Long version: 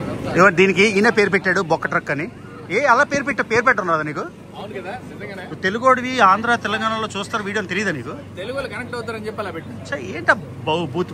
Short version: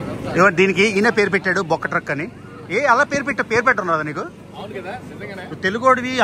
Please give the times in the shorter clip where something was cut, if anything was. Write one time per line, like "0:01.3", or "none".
none